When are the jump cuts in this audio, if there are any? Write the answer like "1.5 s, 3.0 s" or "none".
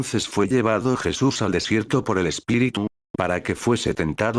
2.9 s

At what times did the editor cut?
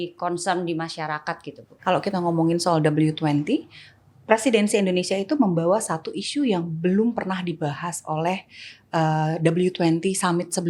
1.6 s

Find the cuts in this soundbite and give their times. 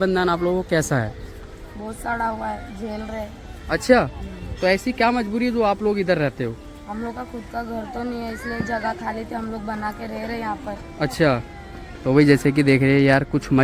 none

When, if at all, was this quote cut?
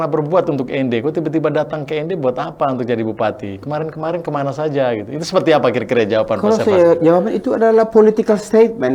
none

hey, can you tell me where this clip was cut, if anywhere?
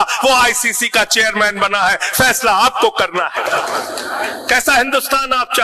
none

